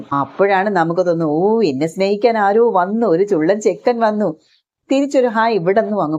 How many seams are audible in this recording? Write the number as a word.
zero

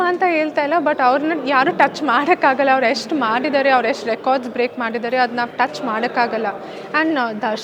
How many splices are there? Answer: zero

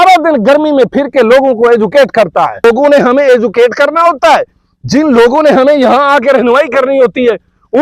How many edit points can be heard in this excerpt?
one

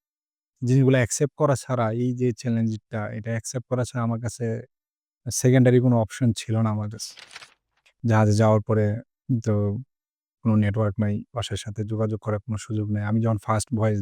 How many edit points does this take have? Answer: two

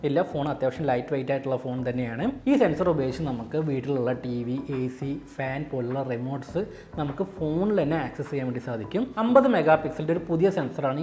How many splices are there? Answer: two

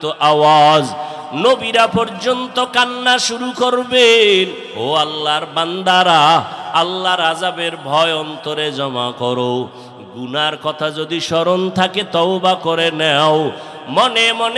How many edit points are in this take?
one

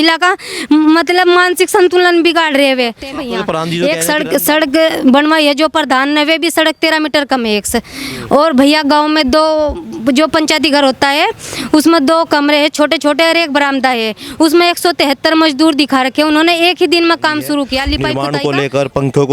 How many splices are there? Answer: two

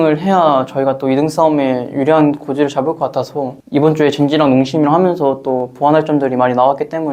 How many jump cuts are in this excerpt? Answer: zero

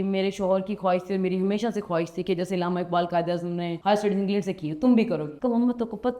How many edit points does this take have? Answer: two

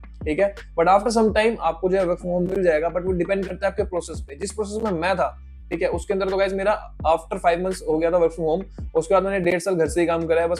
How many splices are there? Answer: zero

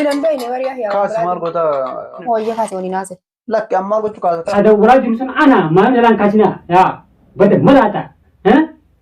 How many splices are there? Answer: two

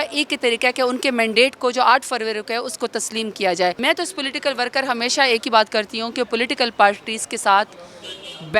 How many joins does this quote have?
one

